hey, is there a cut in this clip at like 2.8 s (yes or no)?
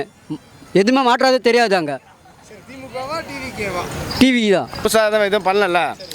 no